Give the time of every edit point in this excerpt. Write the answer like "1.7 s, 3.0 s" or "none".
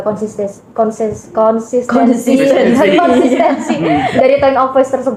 none